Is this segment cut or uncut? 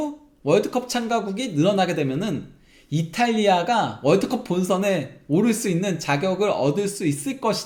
uncut